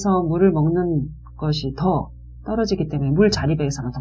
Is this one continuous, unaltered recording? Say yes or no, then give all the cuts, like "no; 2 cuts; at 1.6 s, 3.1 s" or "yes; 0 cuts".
yes; 0 cuts